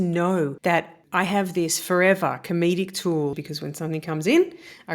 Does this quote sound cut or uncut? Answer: cut